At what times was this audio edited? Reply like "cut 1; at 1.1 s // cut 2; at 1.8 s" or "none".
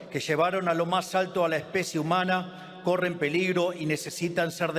none